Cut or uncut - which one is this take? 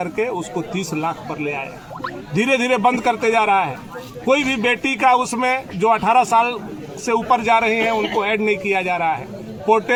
uncut